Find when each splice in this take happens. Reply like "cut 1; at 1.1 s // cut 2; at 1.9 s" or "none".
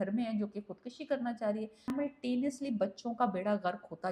cut 1; at 1.9 s